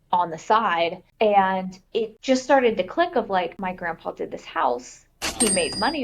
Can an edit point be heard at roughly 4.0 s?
no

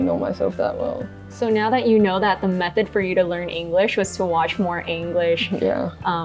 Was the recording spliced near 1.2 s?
yes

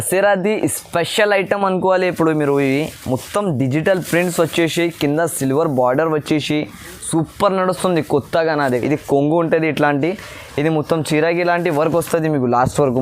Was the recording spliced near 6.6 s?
no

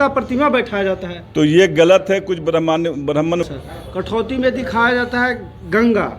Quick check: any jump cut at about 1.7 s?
no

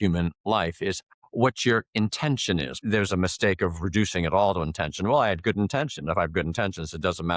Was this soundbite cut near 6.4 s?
no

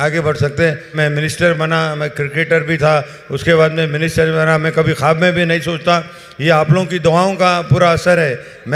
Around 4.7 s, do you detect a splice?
no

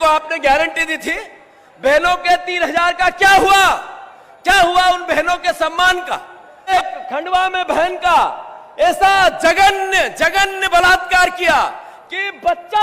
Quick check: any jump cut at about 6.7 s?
yes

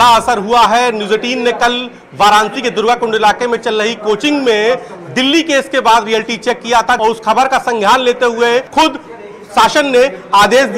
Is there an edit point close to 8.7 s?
yes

